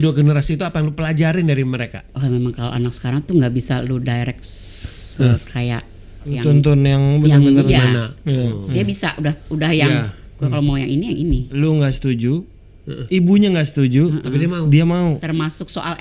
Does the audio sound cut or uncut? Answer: cut